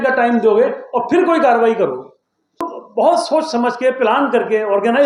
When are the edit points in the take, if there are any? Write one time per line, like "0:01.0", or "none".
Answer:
0:02.8